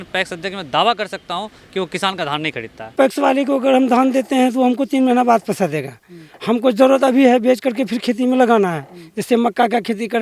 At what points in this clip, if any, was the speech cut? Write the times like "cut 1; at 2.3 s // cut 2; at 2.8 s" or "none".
cut 1; at 2.8 s